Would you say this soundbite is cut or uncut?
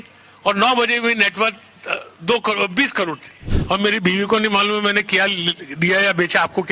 cut